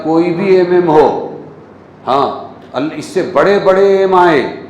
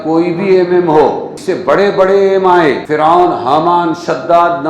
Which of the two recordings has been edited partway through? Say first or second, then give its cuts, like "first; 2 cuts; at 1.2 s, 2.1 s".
second; 2 cuts; at 1.3 s, 2.8 s